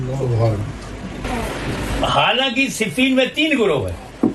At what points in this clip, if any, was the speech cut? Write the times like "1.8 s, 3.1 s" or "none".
1.2 s